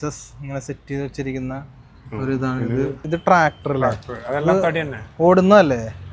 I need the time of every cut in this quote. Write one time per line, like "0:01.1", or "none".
0:03.0